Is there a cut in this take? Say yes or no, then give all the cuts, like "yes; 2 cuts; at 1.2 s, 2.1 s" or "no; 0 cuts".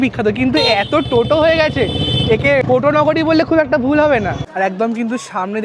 yes; 2 cuts; at 2.6 s, 4.4 s